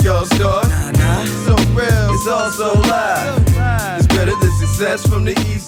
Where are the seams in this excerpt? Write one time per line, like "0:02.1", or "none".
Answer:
none